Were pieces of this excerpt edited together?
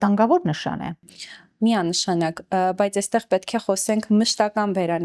no; 0 cuts

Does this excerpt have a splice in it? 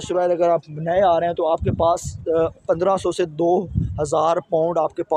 no; 0 cuts

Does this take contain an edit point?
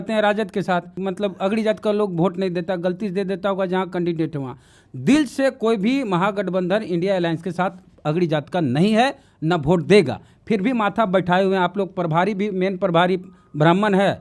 yes; 1 cut; at 0.9 s

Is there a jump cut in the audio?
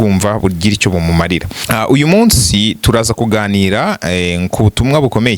yes; 1 cut; at 1.5 s

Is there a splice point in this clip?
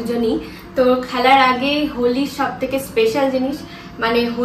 no; 0 cuts

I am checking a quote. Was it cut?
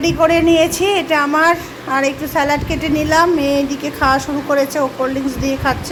no; 0 cuts

